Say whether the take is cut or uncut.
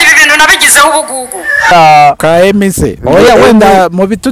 cut